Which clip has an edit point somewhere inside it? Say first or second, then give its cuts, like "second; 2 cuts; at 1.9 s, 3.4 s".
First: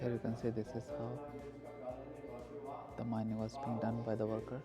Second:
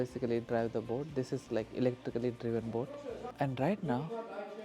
second; 1 cut; at 3.3 s